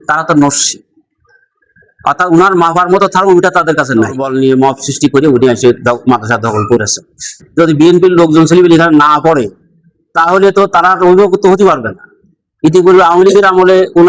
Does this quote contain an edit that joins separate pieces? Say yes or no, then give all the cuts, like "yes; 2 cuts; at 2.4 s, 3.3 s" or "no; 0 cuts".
yes; 2 cuts; at 4.2 s, 7.4 s